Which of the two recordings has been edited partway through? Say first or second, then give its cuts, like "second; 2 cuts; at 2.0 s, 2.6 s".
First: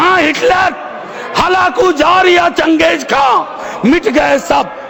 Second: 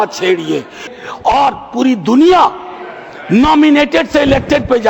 second; 1 cut; at 1.0 s